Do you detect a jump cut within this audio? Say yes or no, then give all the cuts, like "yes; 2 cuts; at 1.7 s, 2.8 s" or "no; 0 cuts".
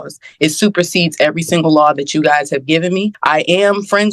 yes; 1 cut; at 3.1 s